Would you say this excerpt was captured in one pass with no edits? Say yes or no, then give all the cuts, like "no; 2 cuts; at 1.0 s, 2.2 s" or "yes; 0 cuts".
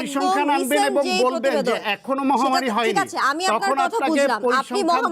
yes; 0 cuts